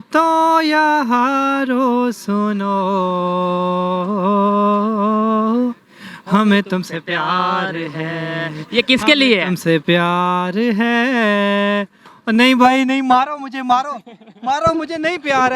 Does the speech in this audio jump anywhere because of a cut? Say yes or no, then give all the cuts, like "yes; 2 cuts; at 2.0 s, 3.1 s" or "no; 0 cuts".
no; 0 cuts